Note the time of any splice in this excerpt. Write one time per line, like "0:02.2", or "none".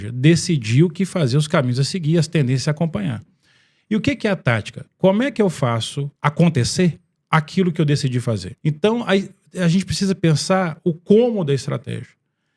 0:06.0
0:08.5